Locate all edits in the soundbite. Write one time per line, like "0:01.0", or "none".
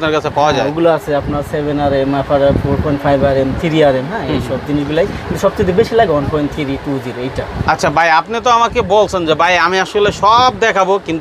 none